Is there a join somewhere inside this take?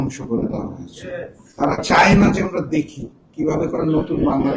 no; 0 cuts

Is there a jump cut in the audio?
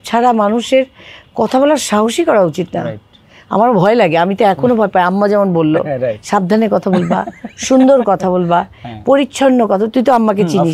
no; 0 cuts

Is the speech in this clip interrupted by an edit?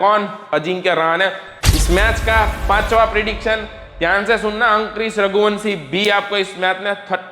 yes; 1 cut; at 1.5 s

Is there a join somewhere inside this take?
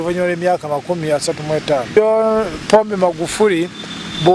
yes; 1 cut; at 2.0 s

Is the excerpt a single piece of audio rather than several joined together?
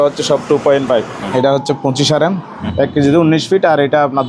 no; 2 cuts; at 1.2 s, 2.6 s

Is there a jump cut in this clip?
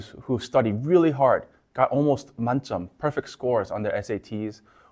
no; 0 cuts

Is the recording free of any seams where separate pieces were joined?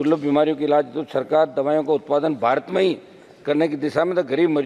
yes; 0 cuts

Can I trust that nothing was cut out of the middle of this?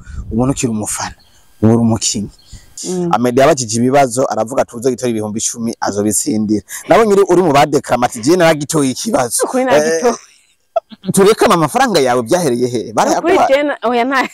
no; 1 cut; at 2.8 s

